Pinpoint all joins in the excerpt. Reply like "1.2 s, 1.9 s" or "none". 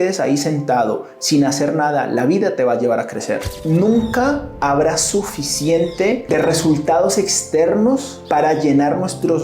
3.5 s, 6.2 s, 8.1 s